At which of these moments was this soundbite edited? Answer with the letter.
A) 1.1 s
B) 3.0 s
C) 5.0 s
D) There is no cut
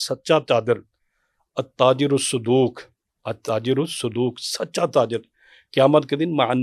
D